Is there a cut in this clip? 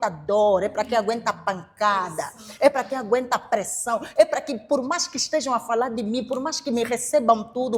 no; 0 cuts

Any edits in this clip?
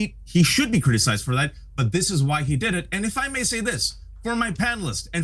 yes; 1 cut; at 1.6 s

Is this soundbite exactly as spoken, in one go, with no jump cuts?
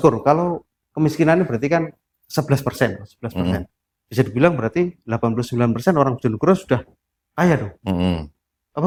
yes; 0 cuts

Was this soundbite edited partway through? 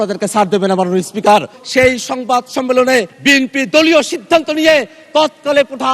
yes; 2 cuts; at 1.6 s, 3.1 s

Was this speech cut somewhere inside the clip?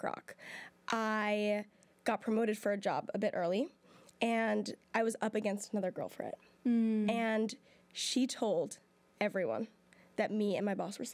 no; 0 cuts

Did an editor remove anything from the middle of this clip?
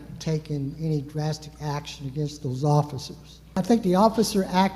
yes; 1 cut; at 3.6 s

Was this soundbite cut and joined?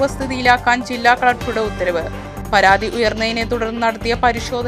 no; 0 cuts

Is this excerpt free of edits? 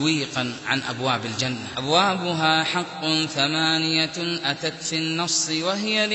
no; 1 cut; at 1.7 s

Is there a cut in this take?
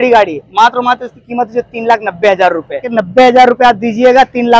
yes; 1 cut; at 2.9 s

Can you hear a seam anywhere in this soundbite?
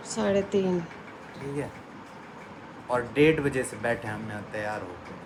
no; 0 cuts

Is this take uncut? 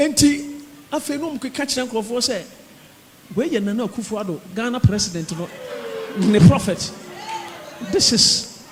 yes; 0 cuts

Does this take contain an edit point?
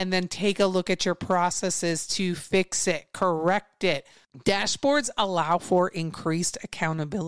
no; 0 cuts

